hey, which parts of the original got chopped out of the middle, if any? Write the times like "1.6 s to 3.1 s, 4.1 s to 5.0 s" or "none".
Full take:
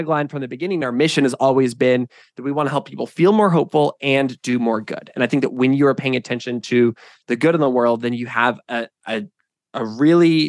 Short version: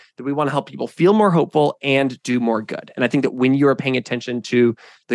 none

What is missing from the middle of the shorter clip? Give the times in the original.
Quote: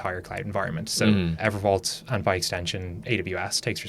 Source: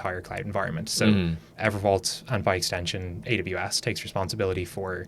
1.3 s to 1.5 s

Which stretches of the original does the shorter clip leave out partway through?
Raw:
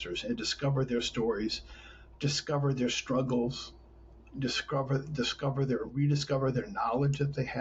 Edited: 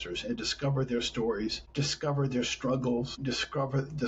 1.6 s to 2.1 s, 3.6 s to 4.3 s

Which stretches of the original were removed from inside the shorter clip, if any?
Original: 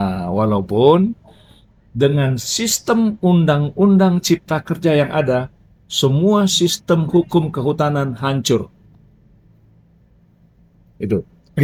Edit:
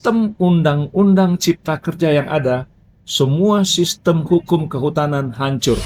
none

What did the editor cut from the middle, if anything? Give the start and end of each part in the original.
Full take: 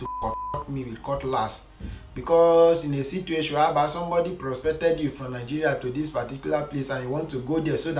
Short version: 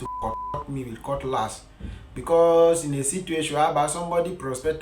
none

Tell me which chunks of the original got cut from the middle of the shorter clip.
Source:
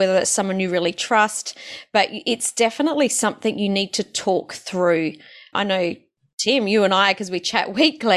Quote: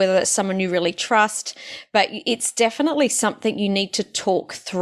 none

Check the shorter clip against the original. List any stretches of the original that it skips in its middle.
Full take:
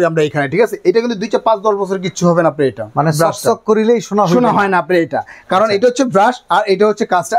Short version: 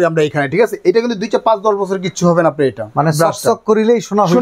none

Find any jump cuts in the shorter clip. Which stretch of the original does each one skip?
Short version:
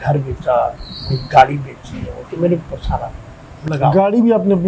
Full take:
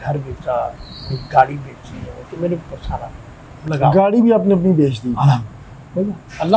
none

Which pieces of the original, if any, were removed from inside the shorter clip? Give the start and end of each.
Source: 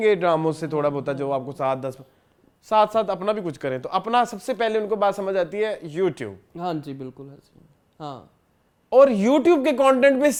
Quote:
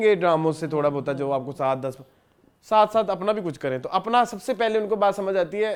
none

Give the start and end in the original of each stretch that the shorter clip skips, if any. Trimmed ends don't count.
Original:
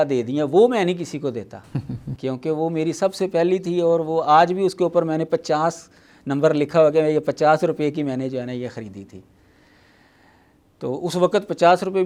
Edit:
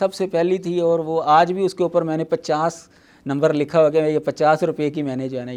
none

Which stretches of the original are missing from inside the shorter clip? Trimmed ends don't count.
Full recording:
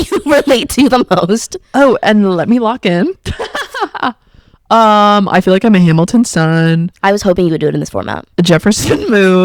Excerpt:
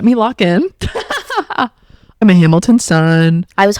4.7 s to 5.7 s

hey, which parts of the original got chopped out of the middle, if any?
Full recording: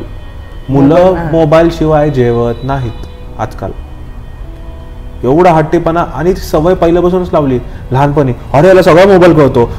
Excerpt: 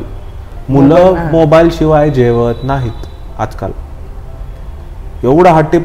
none

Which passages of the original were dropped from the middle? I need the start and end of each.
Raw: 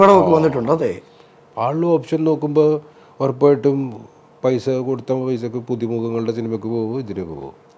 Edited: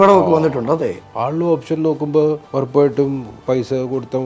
1.0 s to 1.5 s, 2.9 s to 3.1 s, 4.0 s to 4.3 s

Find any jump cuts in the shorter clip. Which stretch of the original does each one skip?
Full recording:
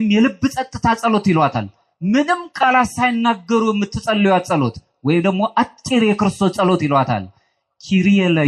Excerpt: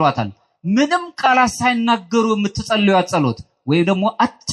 none

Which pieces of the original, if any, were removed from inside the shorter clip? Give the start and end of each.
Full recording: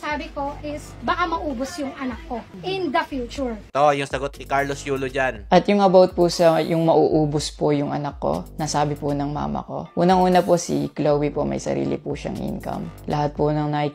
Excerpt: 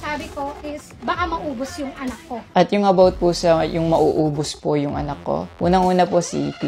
2.4 s to 5.4 s, 8.5 s to 9.9 s

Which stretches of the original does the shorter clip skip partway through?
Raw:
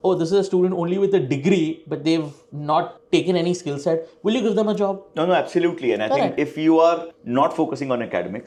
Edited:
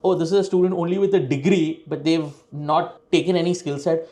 none

